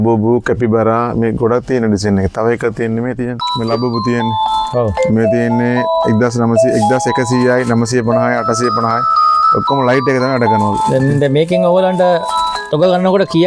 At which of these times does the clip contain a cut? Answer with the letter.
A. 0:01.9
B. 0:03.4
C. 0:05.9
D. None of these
B